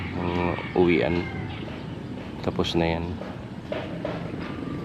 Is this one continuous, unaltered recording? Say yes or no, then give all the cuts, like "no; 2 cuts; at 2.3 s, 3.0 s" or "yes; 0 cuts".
yes; 0 cuts